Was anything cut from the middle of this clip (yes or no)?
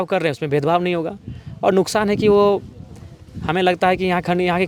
no